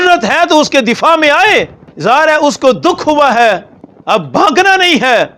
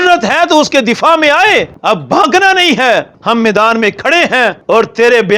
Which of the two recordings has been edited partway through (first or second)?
second